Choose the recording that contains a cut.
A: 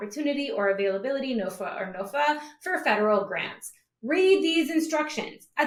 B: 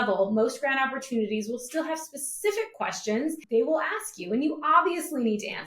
B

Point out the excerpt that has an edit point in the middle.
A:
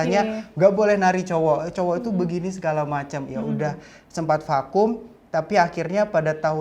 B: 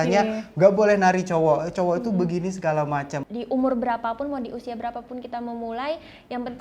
B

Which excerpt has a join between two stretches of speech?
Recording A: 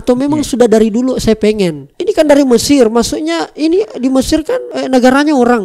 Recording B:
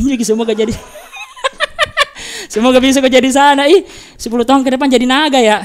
A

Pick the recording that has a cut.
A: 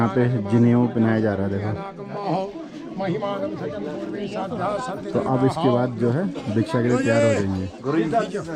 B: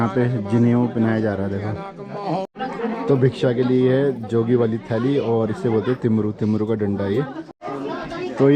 B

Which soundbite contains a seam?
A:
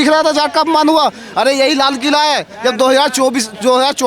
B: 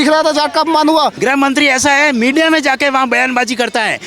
B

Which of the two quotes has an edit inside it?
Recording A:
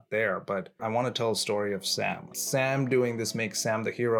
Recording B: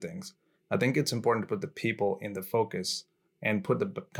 A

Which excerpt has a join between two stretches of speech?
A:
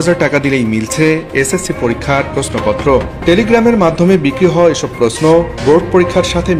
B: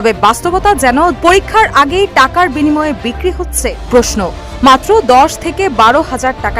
B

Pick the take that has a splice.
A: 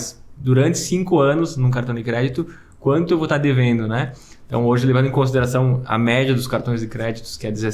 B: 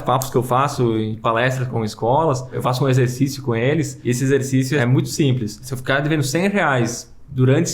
B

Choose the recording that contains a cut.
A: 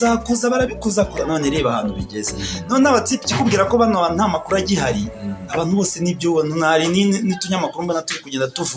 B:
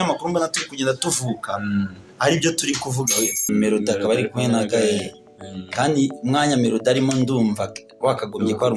B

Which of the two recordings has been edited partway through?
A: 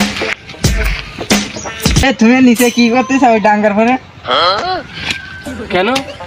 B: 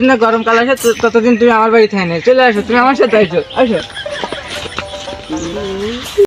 A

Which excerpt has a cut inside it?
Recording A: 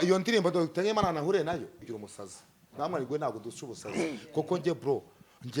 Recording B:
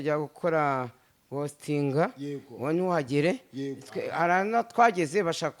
A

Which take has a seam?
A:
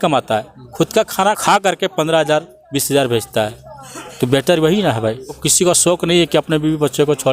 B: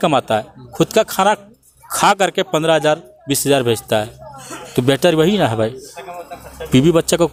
A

